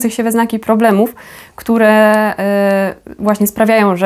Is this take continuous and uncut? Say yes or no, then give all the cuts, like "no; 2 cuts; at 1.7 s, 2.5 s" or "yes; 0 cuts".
yes; 0 cuts